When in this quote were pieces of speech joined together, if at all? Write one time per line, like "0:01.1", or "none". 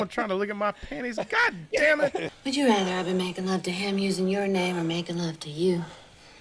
0:02.3